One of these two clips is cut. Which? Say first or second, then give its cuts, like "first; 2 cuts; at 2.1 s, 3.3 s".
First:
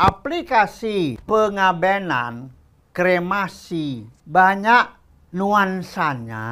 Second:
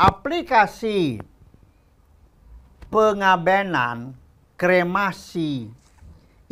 first; 2 cuts; at 1.2 s, 4.1 s